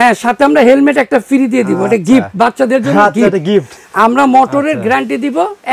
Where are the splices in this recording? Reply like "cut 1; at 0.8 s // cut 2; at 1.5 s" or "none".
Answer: none